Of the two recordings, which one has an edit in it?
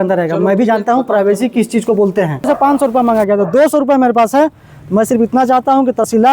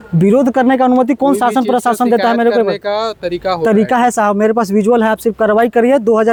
first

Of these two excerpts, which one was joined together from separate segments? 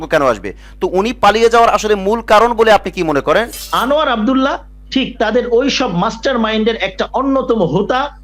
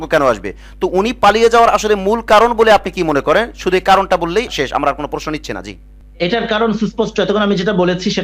first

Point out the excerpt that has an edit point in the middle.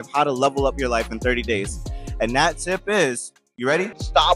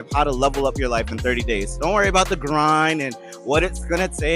second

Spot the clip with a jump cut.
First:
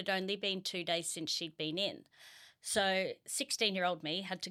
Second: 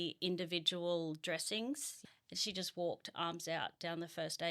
second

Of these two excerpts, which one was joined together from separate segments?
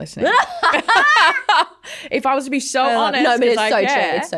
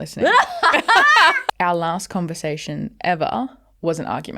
second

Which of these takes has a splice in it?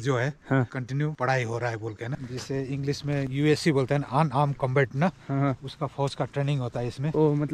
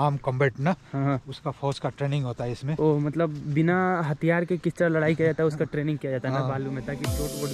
first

